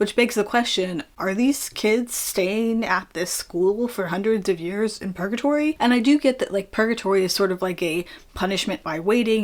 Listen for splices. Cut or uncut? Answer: uncut